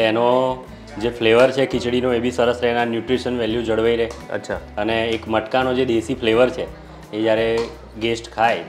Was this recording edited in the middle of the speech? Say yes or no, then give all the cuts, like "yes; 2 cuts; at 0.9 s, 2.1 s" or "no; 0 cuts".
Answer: no; 0 cuts